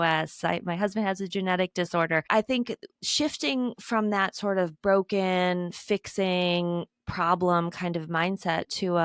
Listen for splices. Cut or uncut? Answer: cut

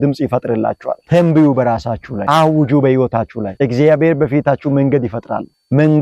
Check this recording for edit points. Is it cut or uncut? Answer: cut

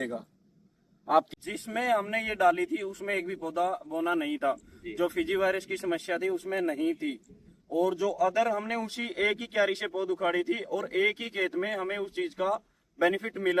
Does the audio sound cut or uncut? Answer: cut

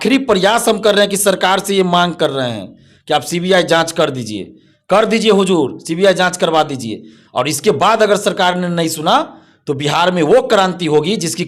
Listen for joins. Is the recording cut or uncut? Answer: uncut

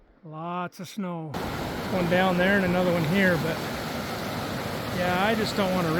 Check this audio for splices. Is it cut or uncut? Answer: cut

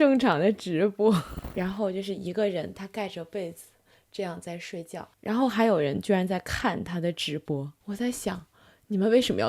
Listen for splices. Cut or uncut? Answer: cut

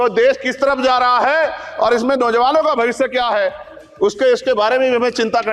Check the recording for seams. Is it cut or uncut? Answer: uncut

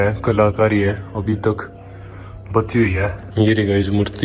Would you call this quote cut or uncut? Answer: cut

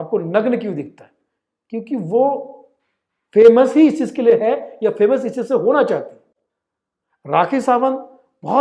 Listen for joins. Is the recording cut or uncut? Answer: uncut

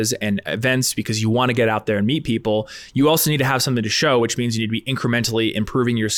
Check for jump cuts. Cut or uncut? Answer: uncut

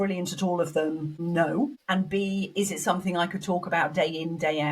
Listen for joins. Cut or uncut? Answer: cut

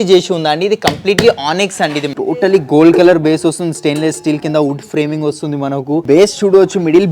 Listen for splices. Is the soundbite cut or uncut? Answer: cut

